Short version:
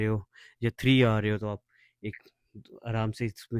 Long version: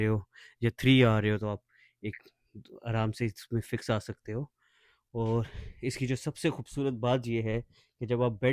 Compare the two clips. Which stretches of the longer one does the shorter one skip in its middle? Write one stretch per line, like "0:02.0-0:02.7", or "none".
none